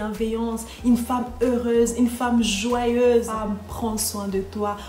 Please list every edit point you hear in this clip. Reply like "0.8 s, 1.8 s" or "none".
3.3 s